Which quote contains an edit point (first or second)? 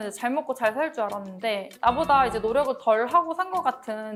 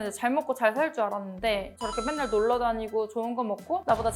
second